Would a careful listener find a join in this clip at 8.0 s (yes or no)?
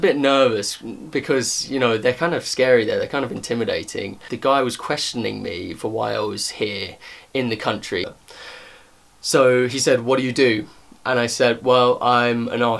yes